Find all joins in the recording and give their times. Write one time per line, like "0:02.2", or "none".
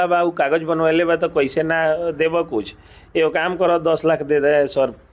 none